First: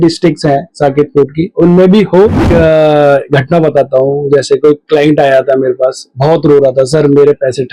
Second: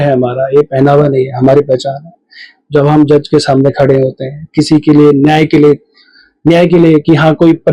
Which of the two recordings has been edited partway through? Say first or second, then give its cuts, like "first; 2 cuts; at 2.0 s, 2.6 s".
first; 1 cut; at 2.5 s